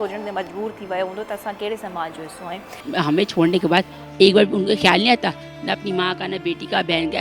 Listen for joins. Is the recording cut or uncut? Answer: cut